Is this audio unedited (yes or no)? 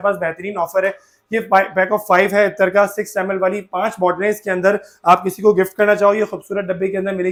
yes